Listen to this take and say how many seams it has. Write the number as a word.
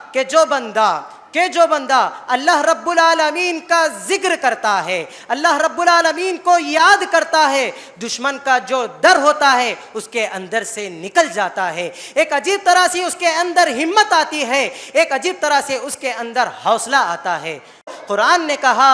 one